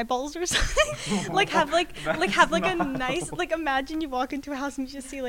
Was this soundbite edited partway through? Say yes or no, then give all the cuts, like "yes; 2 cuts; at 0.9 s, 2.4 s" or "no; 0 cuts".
yes; 1 cut; at 1.0 s